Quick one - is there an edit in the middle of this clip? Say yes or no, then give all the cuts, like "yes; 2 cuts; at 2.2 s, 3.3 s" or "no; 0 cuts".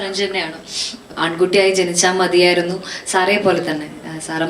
yes; 1 cut; at 1.1 s